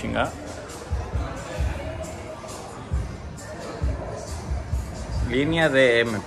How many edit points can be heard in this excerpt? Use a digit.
0